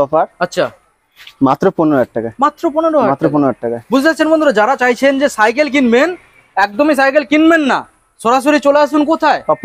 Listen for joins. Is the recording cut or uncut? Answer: uncut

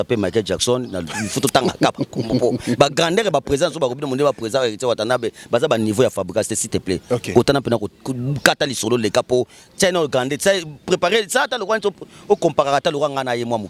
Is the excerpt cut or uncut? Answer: uncut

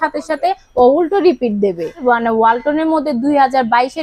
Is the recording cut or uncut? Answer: cut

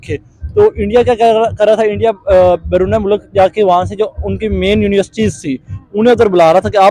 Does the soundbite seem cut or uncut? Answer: uncut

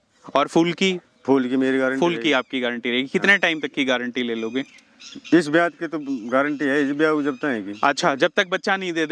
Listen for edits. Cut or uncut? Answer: uncut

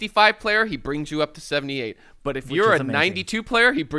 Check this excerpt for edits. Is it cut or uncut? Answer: uncut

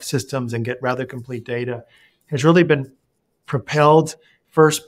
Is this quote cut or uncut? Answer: uncut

